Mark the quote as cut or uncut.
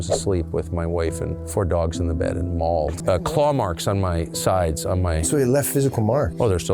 cut